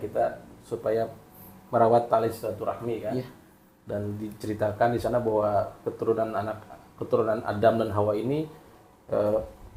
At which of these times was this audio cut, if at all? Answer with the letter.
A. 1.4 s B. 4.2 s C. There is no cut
C